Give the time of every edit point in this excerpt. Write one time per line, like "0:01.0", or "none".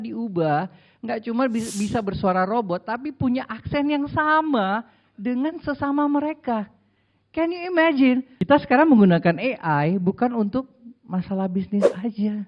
0:08.3